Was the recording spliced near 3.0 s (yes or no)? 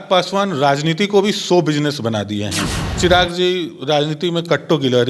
yes